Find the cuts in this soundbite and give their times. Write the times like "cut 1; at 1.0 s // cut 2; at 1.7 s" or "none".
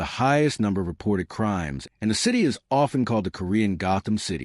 cut 1; at 1.8 s